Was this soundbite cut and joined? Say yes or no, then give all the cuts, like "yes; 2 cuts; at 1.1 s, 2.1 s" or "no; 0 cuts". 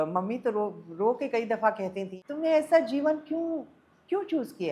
yes; 1 cut; at 2.1 s